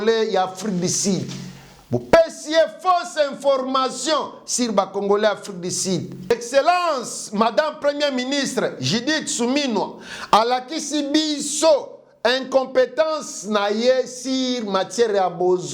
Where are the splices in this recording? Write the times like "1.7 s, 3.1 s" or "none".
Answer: 6.3 s